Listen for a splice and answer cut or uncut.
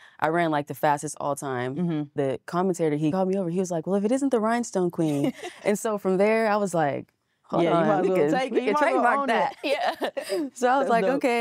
cut